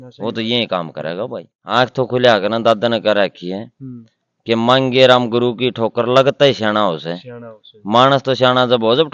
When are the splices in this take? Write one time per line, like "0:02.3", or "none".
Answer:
0:01.5